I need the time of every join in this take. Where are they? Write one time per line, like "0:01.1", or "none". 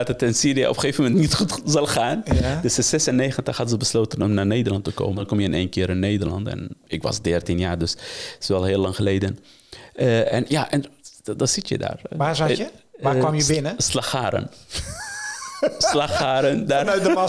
0:05.2